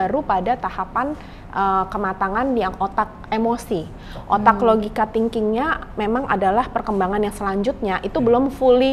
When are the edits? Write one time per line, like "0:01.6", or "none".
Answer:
none